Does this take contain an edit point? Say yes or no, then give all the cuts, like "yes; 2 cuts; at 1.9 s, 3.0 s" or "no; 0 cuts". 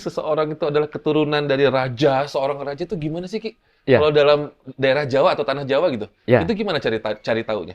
no; 0 cuts